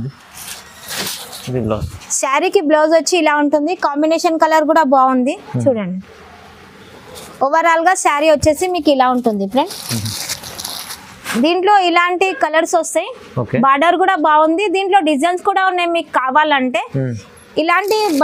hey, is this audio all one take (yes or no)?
yes